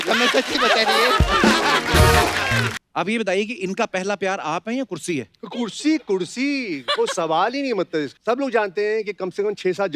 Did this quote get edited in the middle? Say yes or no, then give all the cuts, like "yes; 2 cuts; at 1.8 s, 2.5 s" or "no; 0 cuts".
yes; 2 cuts; at 2.8 s, 8.1 s